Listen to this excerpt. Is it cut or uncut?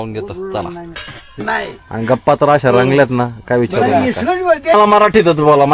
cut